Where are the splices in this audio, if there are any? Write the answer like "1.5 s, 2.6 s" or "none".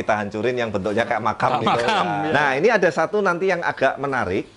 2.2 s